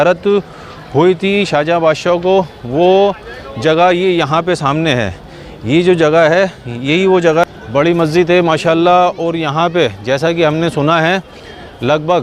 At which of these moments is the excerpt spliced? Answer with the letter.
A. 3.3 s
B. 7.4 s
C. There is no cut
B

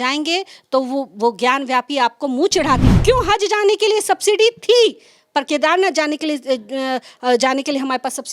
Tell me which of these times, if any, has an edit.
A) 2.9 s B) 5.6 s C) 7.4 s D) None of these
A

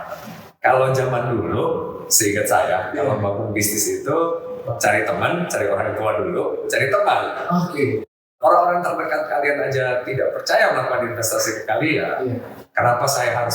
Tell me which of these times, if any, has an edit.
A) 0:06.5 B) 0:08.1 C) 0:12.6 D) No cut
B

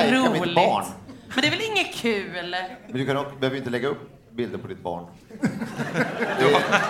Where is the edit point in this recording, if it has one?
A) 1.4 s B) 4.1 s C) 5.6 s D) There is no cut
D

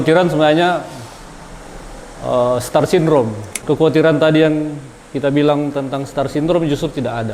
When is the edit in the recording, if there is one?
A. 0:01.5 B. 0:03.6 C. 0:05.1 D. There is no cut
B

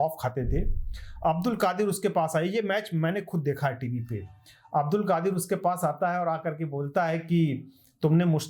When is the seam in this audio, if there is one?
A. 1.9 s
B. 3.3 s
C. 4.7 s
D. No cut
D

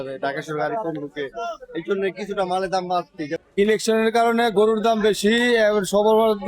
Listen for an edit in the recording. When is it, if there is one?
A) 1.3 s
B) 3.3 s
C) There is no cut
B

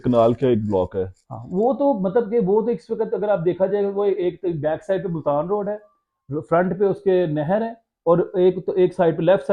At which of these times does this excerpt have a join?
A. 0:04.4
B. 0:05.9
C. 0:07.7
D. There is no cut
D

